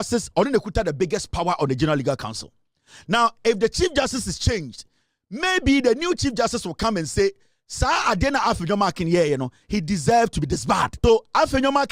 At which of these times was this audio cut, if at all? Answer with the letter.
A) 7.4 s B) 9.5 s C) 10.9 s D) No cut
C